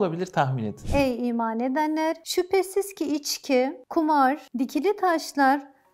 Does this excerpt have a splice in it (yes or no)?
yes